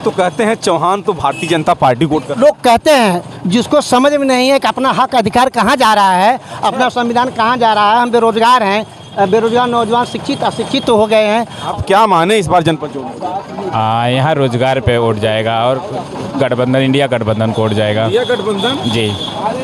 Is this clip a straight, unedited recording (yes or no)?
no